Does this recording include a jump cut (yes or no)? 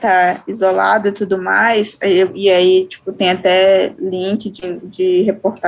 no